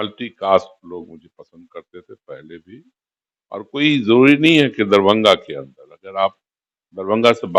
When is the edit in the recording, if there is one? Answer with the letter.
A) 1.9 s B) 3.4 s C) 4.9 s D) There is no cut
D